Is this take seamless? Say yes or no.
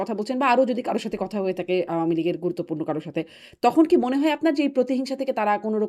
yes